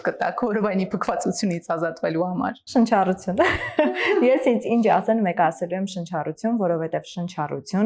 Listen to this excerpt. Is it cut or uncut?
uncut